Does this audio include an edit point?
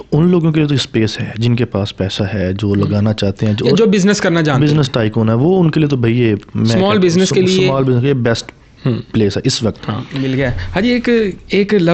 yes; 1 cut; at 10.1 s

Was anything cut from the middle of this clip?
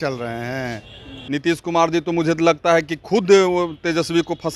yes; 1 cut; at 1.1 s

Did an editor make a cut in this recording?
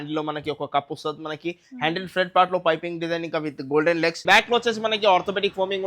yes; 1 cut; at 4.2 s

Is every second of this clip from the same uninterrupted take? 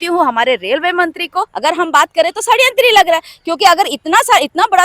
no; 1 cut; at 1.5 s

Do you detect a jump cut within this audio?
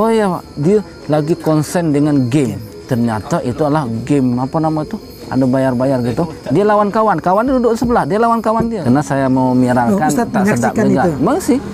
yes; 1 cut; at 8.8 s

